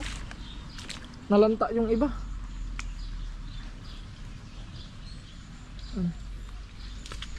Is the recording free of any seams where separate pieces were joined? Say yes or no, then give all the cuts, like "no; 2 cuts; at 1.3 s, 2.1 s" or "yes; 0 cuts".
yes; 0 cuts